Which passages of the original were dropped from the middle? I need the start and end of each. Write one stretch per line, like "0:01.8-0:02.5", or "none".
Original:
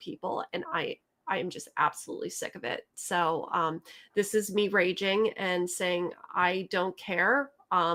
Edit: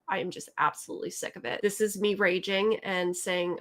0:02.8-0:04.1